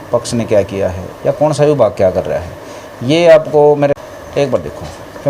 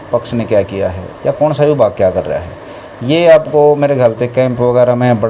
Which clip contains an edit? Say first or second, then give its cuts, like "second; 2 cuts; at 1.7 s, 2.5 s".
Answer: first; 1 cut; at 3.9 s